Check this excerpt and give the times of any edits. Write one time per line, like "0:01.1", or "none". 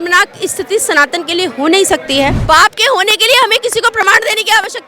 0:02.4